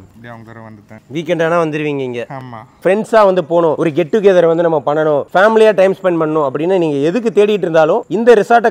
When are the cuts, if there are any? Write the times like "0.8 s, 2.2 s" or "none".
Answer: 2.8 s